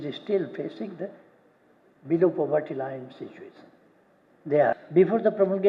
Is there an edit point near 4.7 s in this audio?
yes; 1 cut; at 4.7 s

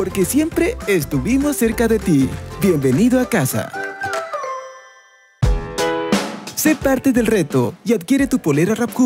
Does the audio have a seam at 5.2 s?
yes; 1 cut; at 5.2 s

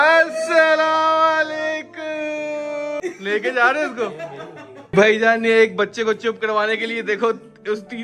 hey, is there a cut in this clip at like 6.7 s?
no; 2 cuts; at 3.0 s, 4.8 s

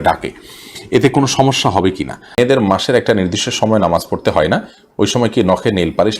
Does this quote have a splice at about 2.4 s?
yes; 1 cut; at 2.4 s

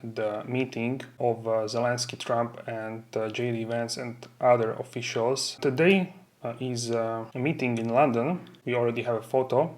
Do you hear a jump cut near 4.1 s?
no; 4 cuts; at 1.1 s, 5.6 s, 7.3 s, 8.5 s

